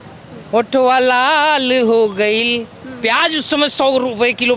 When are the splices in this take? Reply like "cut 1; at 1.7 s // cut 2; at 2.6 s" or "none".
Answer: none